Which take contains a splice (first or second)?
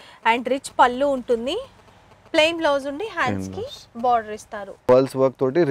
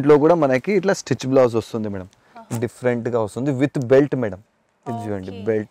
first